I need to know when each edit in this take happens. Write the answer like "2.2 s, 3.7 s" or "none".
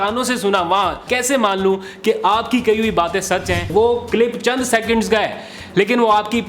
1.0 s, 3.7 s